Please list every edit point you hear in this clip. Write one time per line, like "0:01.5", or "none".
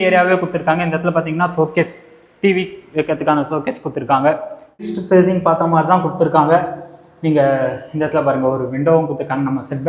0:04.8